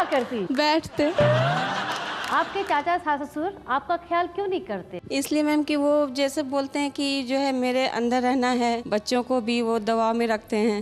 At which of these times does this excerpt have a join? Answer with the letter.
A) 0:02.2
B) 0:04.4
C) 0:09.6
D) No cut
A